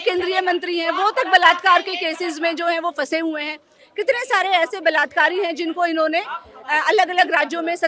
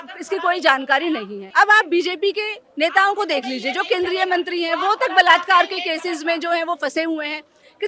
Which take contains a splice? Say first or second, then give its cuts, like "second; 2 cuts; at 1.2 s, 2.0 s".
second; 1 cut; at 1.4 s